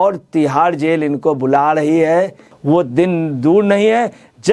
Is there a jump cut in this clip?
yes; 1 cut; at 2.5 s

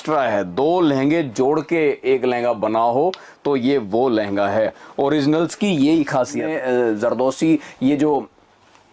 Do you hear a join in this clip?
yes; 1 cut; at 6.5 s

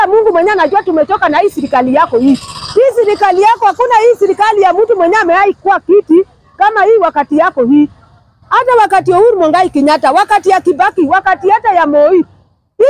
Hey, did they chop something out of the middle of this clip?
no; 0 cuts

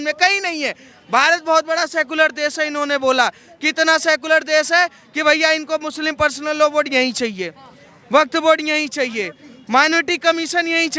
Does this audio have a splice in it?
no; 0 cuts

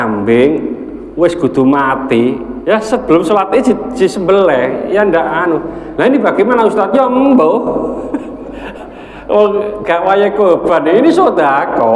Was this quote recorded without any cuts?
no; 1 cut; at 2.5 s

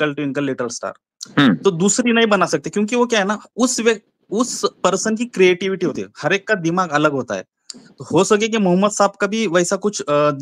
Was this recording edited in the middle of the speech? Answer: no; 0 cuts

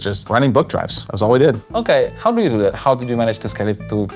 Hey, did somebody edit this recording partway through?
no; 0 cuts

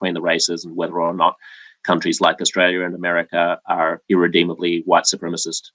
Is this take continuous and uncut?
yes; 0 cuts

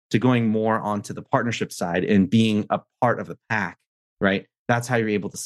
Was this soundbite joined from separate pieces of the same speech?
no; 0 cuts

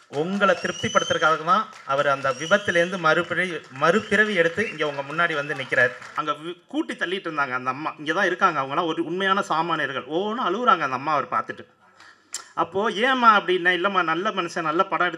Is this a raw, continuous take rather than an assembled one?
no; 1 cut; at 6.1 s

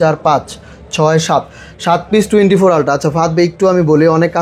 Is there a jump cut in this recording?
no; 0 cuts

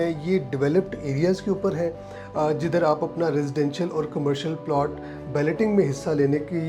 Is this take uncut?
yes; 0 cuts

